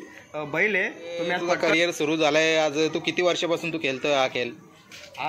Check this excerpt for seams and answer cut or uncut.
cut